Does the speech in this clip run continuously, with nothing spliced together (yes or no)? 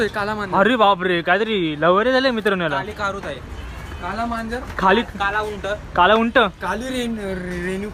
yes